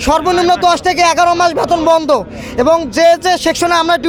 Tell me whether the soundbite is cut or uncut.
uncut